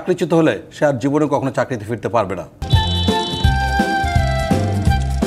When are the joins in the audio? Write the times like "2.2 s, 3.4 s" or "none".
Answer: none